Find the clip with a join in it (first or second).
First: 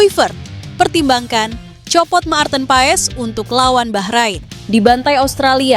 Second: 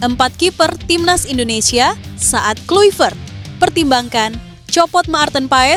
first